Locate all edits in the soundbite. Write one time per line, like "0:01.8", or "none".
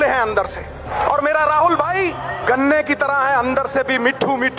0:00.9
0:02.3

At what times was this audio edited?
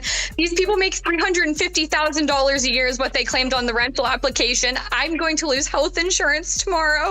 none

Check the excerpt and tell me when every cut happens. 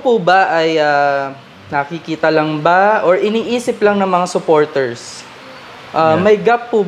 none

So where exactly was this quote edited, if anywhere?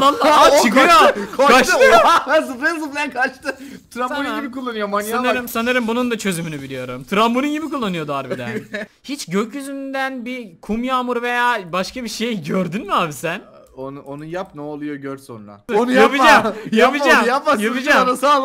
0:08.9
0:15.7

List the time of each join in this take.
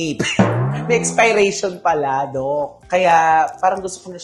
none

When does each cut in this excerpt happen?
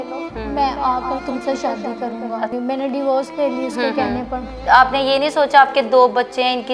0:02.5
0:04.6

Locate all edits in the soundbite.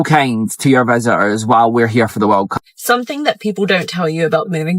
0:02.7

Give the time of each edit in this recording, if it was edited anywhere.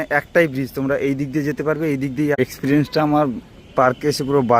0:02.4

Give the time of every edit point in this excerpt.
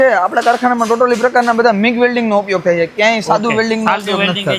none

